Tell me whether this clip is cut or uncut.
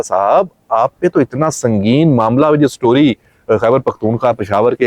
uncut